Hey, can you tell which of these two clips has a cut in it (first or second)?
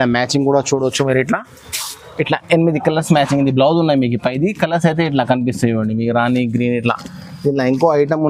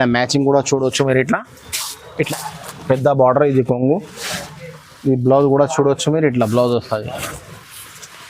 second